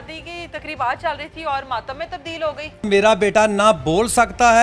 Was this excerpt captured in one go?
no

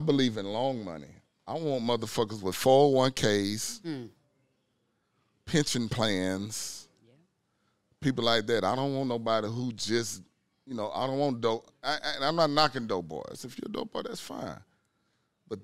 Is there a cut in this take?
no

